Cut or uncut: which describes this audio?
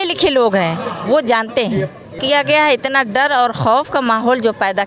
cut